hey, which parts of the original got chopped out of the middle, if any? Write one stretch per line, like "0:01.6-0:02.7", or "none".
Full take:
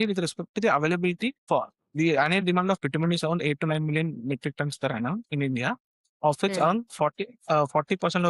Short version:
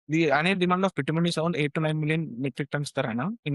none

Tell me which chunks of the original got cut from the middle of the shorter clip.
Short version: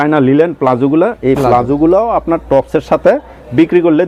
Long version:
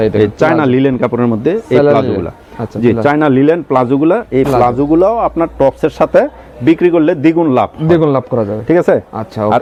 none

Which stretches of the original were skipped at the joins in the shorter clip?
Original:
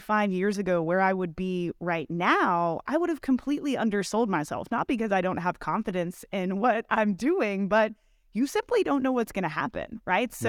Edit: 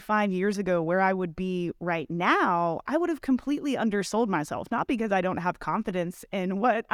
none

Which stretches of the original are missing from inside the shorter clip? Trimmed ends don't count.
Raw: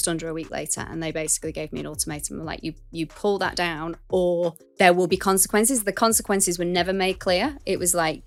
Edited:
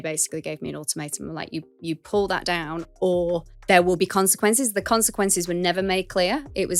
none

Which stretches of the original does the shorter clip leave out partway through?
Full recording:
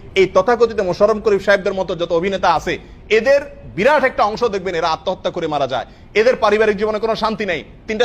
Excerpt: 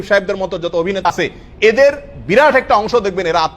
0:02.4-0:02.6

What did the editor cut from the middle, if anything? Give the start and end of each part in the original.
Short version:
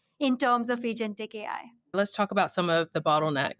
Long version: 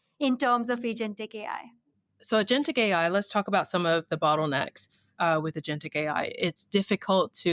0:01.9-0:03.1

